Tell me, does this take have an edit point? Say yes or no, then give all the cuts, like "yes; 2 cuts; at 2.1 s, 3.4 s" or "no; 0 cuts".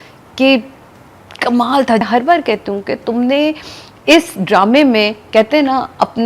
yes; 1 cut; at 2.0 s